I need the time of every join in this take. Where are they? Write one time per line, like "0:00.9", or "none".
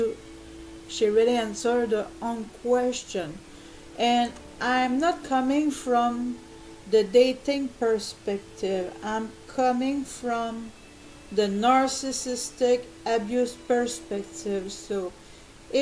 0:08.1